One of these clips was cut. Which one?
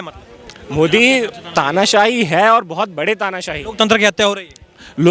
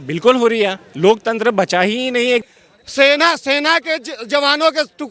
second; 1 cut; at 2.4 s

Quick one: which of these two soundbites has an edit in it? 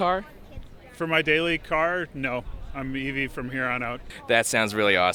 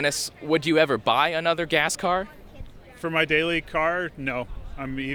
first; 1 cut; at 4.1 s

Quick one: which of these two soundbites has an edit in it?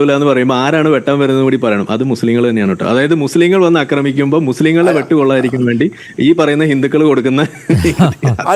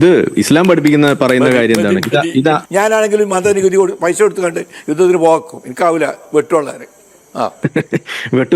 second; 2 cuts; at 2.6 s, 7.5 s

